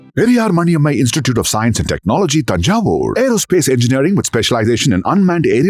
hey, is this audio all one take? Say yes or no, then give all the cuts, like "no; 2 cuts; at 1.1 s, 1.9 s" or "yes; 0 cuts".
yes; 0 cuts